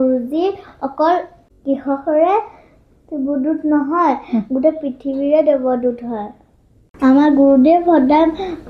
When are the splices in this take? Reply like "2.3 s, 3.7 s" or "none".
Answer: none